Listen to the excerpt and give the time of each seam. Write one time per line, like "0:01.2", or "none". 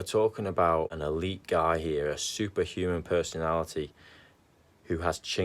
0:00.9